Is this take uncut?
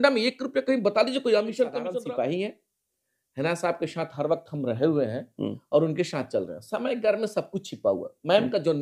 no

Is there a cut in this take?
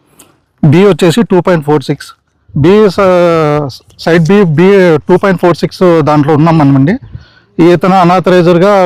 no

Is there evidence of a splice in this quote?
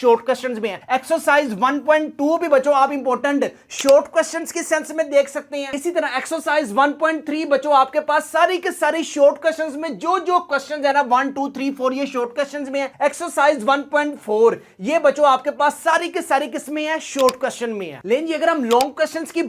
no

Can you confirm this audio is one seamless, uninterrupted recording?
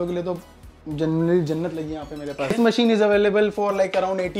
no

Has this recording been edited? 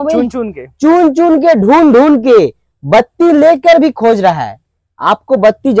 no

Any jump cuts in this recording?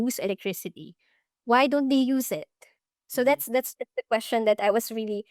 no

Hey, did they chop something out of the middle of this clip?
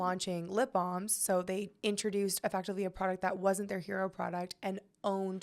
no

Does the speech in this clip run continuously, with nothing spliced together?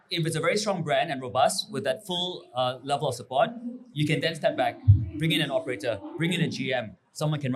yes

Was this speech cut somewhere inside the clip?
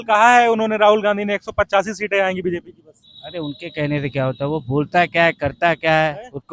no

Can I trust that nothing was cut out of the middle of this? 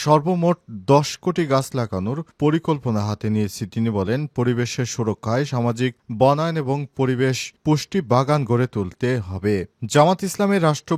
yes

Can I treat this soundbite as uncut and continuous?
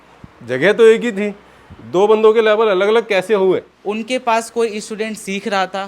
no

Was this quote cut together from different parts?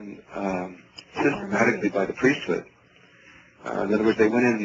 yes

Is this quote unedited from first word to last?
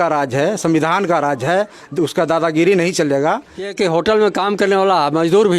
no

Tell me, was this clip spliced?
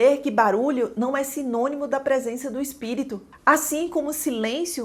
no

